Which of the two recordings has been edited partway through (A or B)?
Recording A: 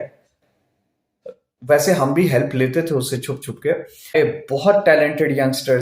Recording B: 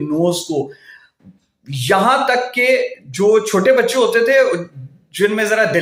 A